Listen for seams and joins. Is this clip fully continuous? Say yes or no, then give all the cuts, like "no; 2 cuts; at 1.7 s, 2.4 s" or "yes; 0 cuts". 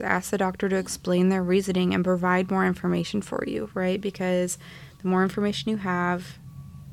yes; 0 cuts